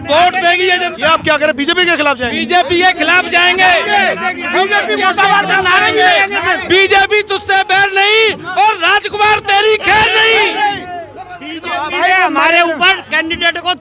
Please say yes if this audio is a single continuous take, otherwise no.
yes